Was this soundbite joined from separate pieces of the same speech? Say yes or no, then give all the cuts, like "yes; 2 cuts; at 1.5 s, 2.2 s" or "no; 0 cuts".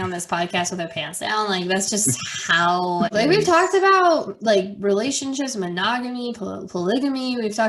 yes; 1 cut; at 3.1 s